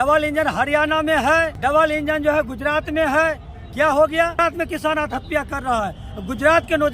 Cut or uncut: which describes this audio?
cut